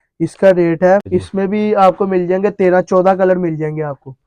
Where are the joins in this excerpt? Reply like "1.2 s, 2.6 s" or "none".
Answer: 1.1 s